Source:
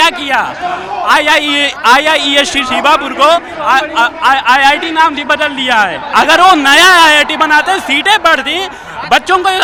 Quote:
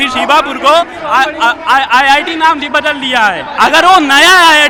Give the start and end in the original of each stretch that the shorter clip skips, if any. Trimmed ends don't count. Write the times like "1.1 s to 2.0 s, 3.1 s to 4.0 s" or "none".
none